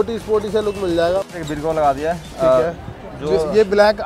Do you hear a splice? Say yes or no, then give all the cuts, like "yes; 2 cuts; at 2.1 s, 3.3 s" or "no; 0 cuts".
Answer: yes; 1 cut; at 1.3 s